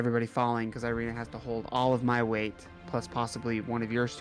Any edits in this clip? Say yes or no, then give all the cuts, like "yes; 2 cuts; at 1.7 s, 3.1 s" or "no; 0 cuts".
no; 0 cuts